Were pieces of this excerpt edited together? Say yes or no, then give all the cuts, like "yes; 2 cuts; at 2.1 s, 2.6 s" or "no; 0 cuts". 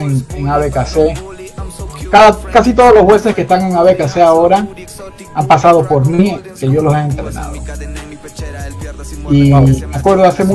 no; 0 cuts